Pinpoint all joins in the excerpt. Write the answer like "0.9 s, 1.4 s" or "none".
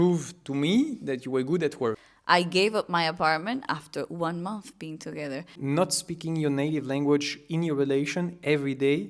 2.1 s, 5.6 s